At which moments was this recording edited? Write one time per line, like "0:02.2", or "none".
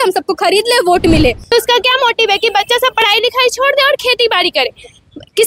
0:01.4